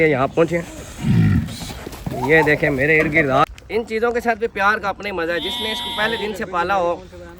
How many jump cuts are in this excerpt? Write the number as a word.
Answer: one